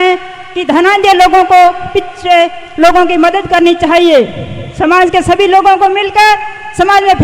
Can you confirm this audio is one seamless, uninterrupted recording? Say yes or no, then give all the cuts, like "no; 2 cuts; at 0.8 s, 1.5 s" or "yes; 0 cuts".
yes; 0 cuts